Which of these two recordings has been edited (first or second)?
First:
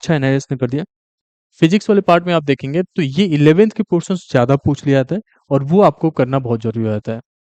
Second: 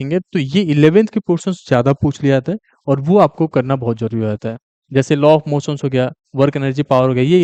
first